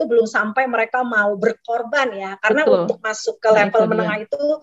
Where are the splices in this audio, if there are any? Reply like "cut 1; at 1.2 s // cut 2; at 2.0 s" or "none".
none

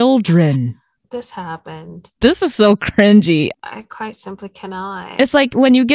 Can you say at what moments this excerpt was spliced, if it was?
cut 1; at 0.9 s // cut 2; at 2.2 s // cut 3; at 3.5 s

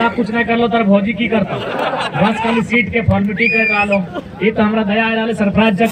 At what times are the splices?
cut 1; at 1.7 s

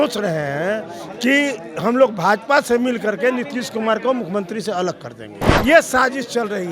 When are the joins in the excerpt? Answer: cut 1; at 5.4 s

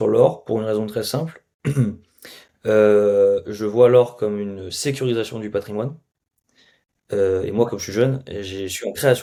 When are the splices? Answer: none

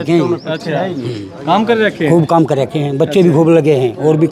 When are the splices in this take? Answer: none

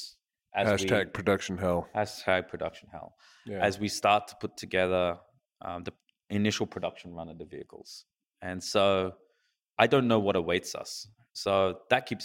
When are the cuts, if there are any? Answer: cut 1; at 11.3 s

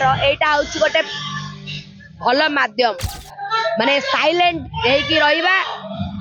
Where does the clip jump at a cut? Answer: none

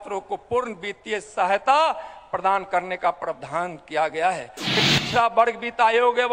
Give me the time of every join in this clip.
cut 1; at 4.8 s

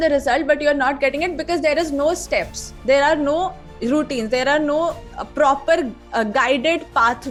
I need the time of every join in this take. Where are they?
none

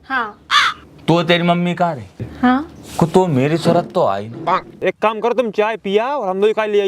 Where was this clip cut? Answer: cut 1; at 4.8 s

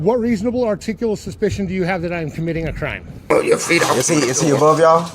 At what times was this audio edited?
cut 1; at 3.3 s

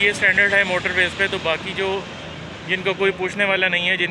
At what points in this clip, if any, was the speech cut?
none

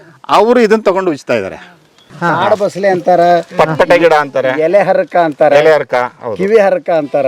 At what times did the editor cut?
cut 1; at 2.1 s

